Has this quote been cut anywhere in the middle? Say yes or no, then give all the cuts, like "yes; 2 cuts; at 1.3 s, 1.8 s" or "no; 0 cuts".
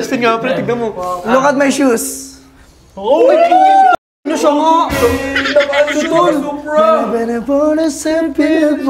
no; 0 cuts